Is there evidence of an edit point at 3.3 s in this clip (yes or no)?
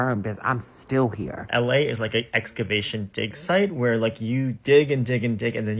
no